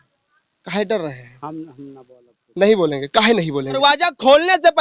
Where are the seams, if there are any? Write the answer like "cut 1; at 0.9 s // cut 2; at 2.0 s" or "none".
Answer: cut 1; at 3.8 s